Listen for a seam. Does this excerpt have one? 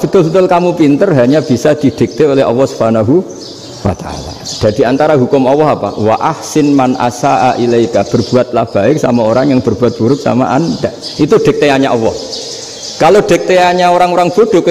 no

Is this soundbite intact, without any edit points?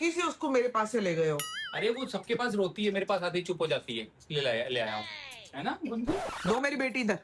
yes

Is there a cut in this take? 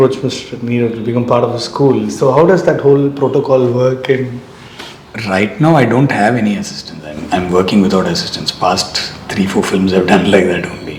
no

